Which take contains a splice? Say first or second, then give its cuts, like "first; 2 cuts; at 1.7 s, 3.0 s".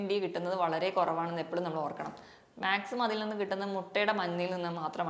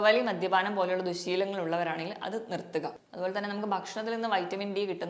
second; 1 cut; at 3.0 s